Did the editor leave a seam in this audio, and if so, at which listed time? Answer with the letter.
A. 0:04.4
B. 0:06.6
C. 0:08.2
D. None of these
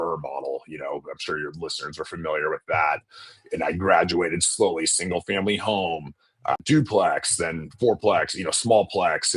B